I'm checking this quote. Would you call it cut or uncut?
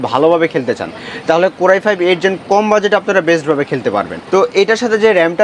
cut